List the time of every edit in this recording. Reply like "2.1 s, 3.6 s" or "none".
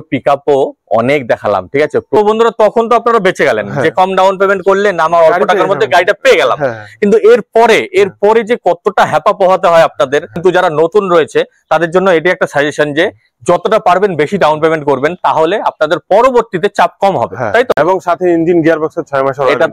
2.2 s, 10.3 s, 17.7 s